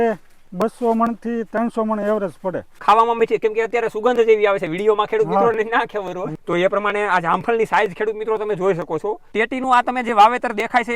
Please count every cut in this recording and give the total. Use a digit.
3